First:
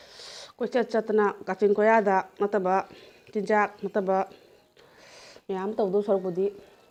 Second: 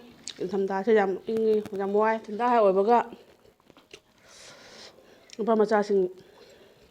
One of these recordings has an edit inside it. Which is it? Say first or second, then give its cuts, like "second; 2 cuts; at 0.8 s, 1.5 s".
second; 1 cut; at 2.3 s